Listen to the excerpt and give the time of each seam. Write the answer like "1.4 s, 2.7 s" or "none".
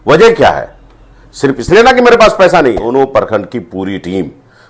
2.8 s